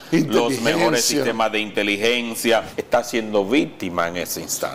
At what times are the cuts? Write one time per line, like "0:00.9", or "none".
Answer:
0:02.8